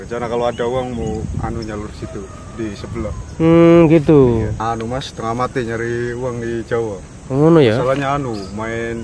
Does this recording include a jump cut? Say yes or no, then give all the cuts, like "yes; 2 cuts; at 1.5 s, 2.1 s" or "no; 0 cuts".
yes; 1 cut; at 4.6 s